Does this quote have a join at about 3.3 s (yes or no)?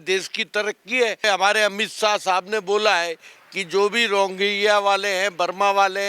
no